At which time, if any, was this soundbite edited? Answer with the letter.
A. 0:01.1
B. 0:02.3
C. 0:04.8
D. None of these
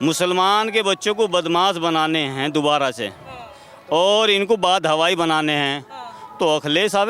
D